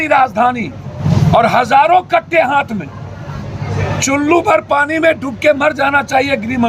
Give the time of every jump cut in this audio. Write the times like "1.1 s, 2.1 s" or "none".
0.9 s, 3.7 s